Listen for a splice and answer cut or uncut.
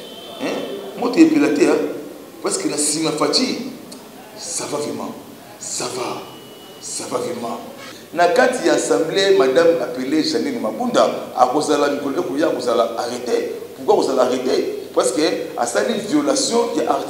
cut